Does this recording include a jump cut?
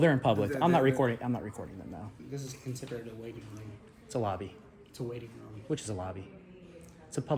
yes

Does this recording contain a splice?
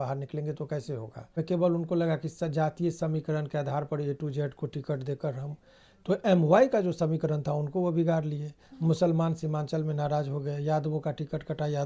yes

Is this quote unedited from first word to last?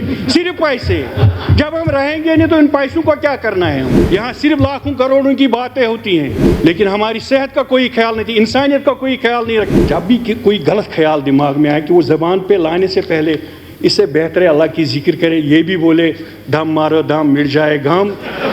no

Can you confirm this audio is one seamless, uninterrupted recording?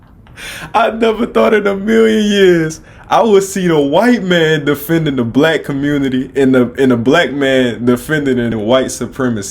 no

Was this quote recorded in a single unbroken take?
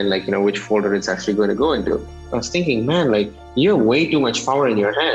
no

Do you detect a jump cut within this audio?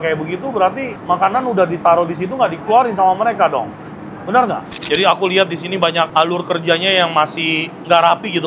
yes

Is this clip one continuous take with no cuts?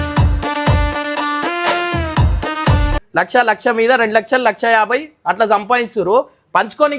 no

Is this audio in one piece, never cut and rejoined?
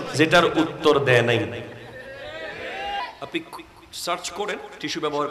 no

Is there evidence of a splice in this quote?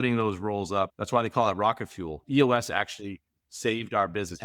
yes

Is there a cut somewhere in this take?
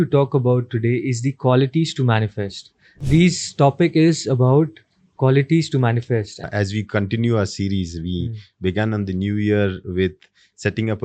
yes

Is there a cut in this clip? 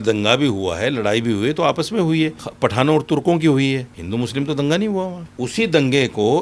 yes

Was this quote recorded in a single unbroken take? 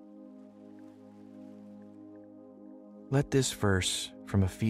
yes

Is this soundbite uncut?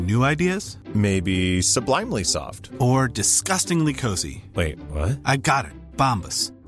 yes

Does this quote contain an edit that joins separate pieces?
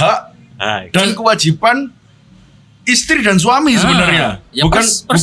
no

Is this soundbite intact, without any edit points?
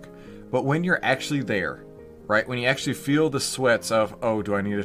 yes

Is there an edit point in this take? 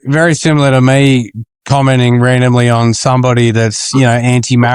no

